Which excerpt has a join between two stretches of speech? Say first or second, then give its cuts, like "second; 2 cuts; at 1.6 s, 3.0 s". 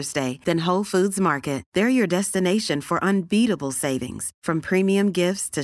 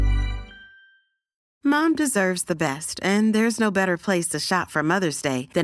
second; 1 cut; at 1.4 s